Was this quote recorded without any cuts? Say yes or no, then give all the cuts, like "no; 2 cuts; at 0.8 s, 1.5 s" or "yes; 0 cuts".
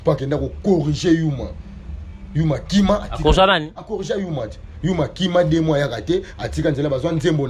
yes; 0 cuts